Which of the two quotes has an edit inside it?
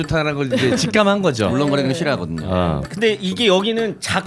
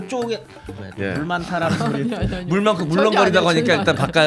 first; 1 cut; at 2.9 s

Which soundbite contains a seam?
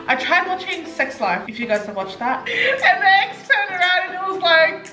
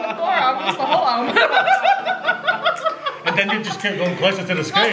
first; 2 cuts; at 1.5 s, 2.5 s

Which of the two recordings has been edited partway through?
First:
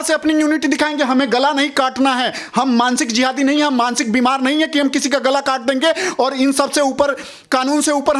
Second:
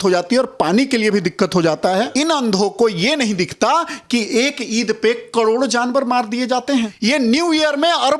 second; 2 cuts; at 2.1 s, 6.9 s

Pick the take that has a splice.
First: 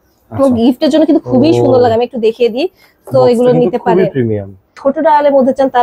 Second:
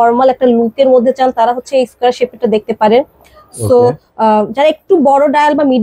first; 1 cut; at 4.7 s

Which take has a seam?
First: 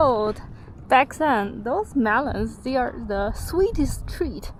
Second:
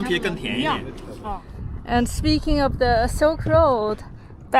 second; 1 cut; at 1.2 s

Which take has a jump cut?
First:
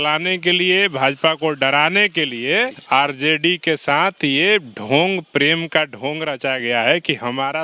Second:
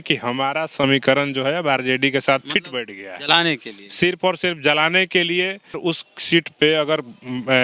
second; 1 cut; at 5.8 s

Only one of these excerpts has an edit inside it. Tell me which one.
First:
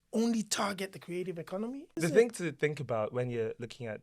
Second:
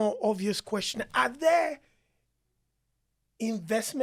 first; 1 cut; at 2.0 s

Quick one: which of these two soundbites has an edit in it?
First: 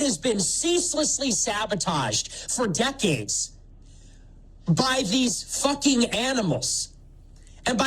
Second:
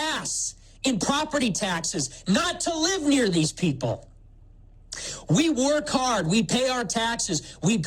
first; 1 cut; at 5.5 s

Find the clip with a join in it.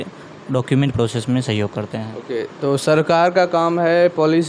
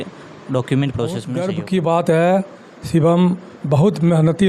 second; 1 cut; at 1.3 s

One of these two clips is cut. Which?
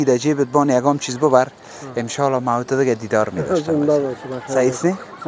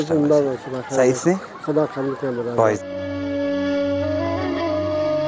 second; 1 cut; at 2.8 s

